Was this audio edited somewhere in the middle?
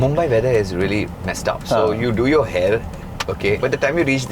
yes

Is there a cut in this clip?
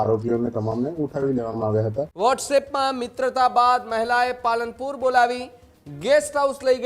yes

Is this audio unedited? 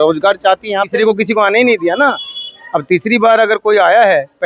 no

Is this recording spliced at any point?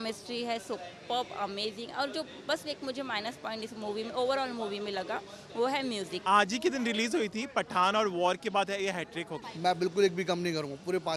yes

